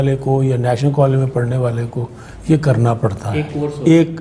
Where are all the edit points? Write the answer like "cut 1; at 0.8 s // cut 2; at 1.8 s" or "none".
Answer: none